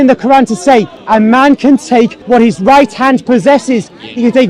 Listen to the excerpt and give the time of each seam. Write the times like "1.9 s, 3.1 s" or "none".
1.0 s, 2.2 s